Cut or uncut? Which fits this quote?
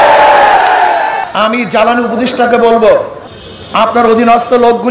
cut